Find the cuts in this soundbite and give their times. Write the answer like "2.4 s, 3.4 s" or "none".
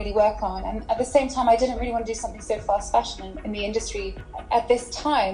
4.3 s